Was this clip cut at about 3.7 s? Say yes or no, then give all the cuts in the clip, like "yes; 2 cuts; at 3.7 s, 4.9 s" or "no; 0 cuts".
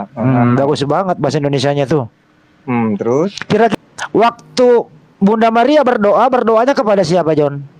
yes; 1 cut; at 3.7 s